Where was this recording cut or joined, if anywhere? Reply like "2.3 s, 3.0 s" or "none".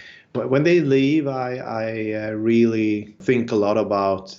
3.2 s